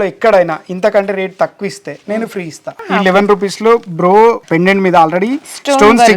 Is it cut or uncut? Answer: cut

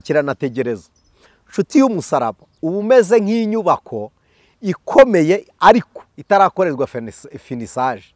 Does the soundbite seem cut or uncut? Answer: uncut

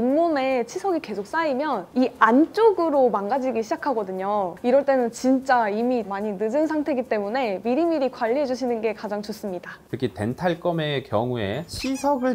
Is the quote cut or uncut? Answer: cut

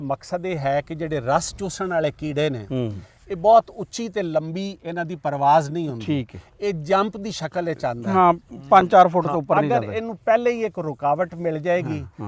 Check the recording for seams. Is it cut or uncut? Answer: uncut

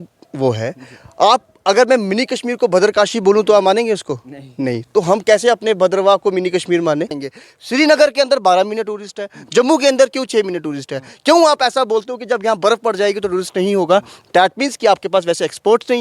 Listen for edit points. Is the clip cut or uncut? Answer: cut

